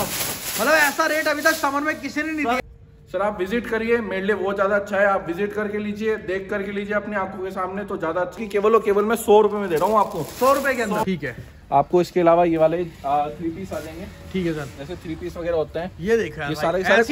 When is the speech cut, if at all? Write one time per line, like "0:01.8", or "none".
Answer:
0:02.6
0:08.4
0:11.0